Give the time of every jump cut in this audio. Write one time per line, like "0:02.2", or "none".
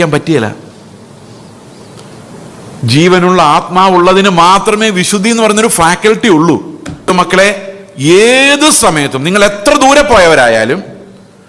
0:07.1